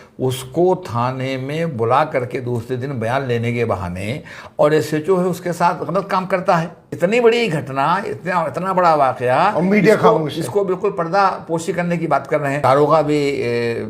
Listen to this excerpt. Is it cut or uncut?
cut